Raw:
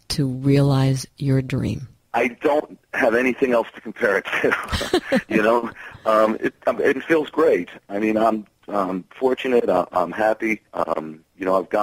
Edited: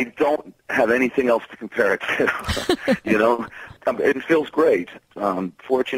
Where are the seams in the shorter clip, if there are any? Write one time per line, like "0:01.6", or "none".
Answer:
0:03.7
0:05.0